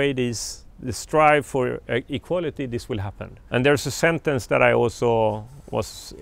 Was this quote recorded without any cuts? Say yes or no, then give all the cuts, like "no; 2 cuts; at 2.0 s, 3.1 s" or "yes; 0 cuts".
yes; 0 cuts